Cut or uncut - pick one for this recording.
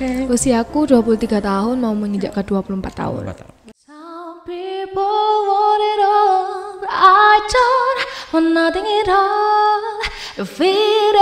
cut